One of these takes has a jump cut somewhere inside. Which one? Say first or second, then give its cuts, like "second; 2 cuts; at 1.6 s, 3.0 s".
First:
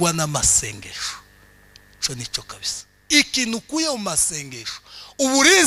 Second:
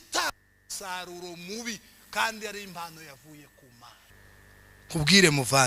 second; 1 cut; at 4.1 s